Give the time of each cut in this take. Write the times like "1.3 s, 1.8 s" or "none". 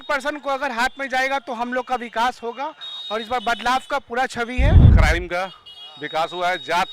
4.9 s